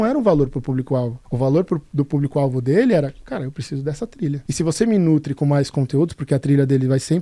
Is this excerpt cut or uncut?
cut